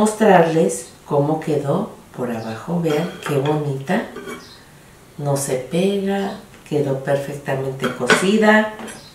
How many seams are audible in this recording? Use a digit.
0